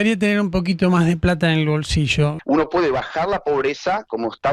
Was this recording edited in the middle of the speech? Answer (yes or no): yes